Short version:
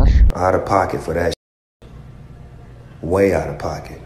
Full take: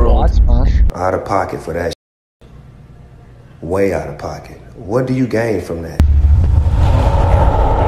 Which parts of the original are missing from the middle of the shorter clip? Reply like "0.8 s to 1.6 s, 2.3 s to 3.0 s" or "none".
none